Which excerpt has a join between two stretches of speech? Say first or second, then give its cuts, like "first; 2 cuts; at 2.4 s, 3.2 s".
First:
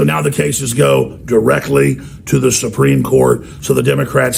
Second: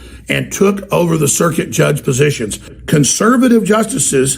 second; 1 cut; at 2.7 s